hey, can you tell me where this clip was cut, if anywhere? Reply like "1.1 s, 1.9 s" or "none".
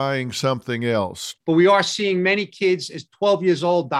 1.2 s